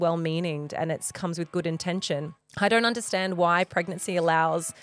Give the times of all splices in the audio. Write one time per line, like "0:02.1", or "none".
0:02.4